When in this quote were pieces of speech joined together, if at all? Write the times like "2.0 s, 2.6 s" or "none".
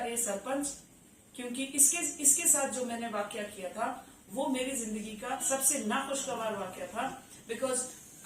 5.4 s